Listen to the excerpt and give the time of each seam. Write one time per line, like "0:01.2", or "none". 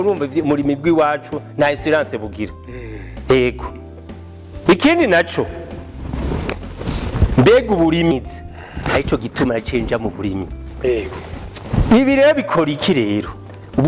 0:08.1